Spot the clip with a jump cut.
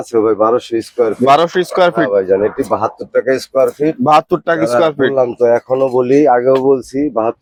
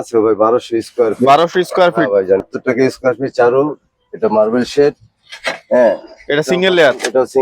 second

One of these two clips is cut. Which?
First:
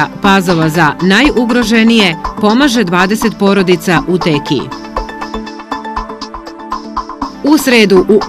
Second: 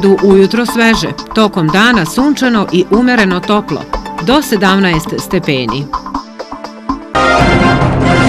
second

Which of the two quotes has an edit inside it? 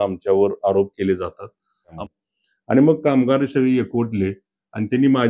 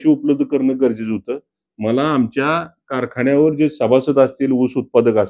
first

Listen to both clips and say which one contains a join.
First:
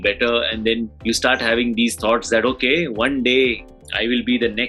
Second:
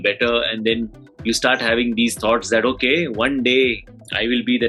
first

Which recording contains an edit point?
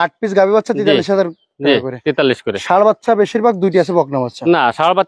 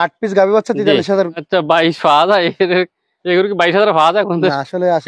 second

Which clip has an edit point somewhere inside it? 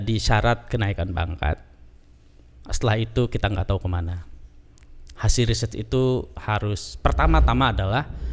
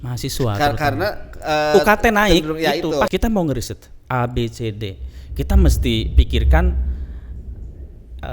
second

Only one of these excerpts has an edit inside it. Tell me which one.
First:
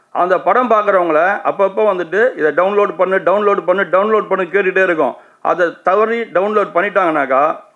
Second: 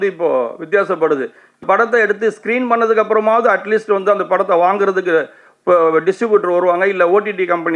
second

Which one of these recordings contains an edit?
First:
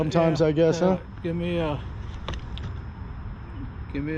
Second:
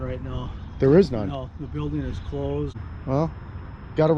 second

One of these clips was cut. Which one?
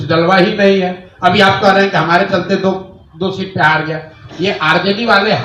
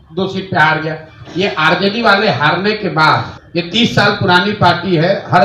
second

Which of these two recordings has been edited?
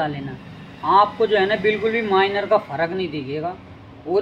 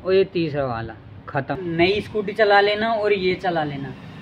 second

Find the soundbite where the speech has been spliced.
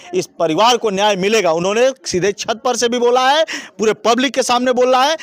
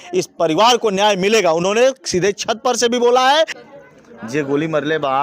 second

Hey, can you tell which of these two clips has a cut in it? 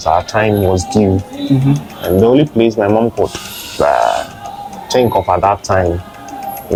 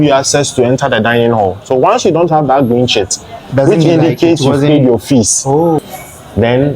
second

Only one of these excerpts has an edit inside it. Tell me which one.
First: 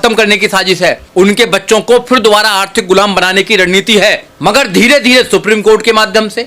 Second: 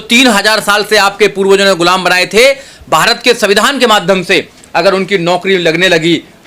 first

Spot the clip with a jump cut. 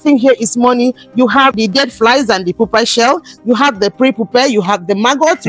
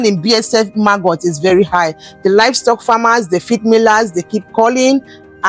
first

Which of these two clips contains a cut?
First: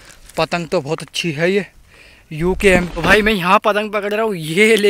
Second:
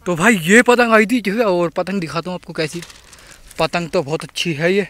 first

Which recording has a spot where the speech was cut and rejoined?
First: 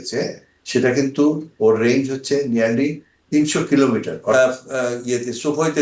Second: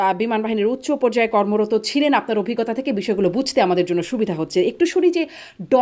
first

